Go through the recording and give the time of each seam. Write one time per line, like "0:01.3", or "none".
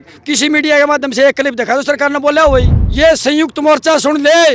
0:02.8